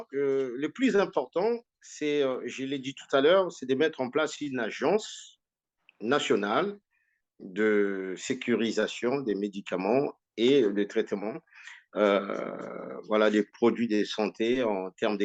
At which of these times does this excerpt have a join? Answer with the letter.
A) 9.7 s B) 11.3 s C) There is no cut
C